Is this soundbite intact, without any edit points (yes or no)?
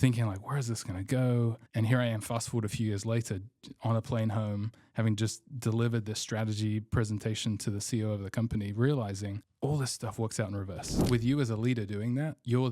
no